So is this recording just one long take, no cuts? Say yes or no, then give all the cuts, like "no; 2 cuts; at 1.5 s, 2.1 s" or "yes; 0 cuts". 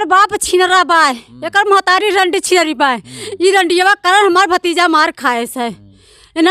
yes; 0 cuts